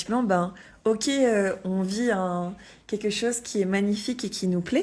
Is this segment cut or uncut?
uncut